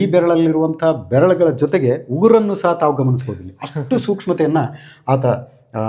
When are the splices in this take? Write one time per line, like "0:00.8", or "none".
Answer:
none